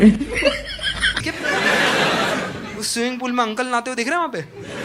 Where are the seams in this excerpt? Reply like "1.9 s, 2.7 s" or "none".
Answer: none

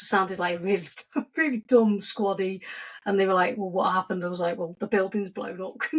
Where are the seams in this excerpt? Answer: none

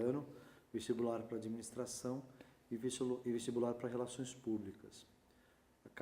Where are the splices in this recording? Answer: 4.4 s

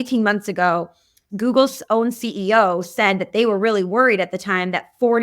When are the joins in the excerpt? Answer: 1.2 s

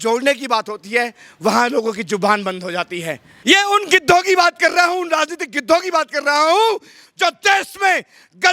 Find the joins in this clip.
3.3 s

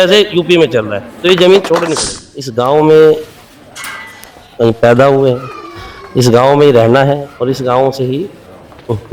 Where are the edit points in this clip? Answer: 2.4 s

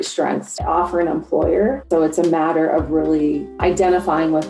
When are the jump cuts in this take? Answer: 1.8 s, 3.5 s

